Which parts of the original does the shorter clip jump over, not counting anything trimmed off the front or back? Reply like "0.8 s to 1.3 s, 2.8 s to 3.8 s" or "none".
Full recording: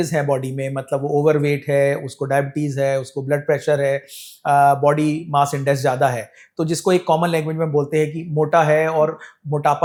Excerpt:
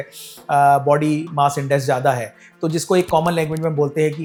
none

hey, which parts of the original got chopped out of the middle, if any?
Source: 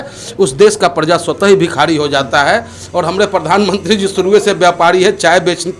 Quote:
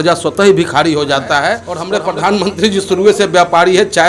2.8 s to 3.0 s

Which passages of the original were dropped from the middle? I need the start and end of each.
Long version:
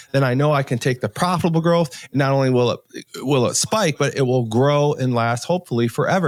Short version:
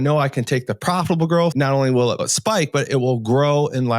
1.9 s to 2.1 s, 2.9 s to 3.6 s

